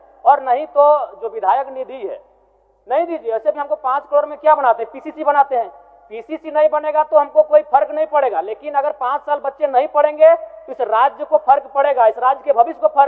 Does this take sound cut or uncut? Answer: uncut